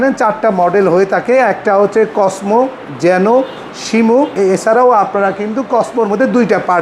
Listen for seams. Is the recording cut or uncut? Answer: cut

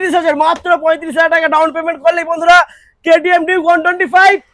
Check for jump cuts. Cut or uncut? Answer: uncut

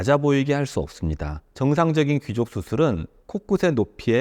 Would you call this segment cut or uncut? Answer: cut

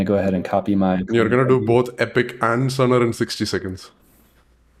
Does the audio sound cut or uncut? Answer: uncut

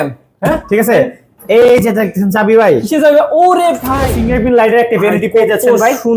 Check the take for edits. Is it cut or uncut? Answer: cut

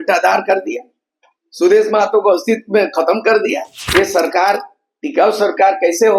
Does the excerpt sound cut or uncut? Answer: cut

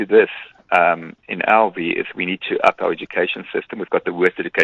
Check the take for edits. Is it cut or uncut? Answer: uncut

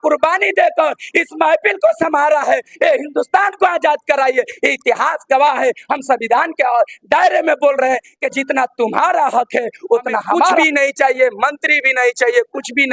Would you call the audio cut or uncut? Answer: cut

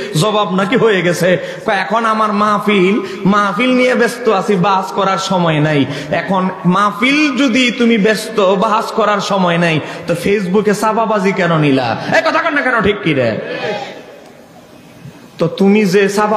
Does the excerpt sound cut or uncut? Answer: uncut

